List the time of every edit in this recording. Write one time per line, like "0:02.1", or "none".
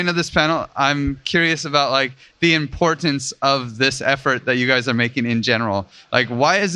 none